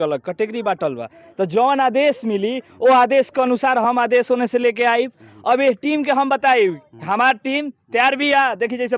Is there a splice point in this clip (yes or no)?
no